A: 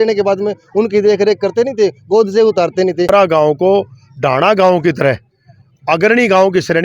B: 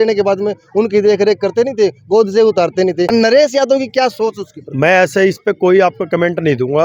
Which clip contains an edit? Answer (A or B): A